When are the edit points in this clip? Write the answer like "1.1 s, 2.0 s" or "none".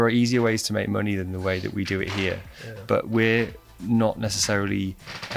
none